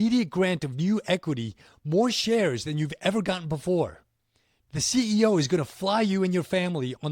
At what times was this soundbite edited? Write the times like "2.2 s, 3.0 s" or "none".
4.3 s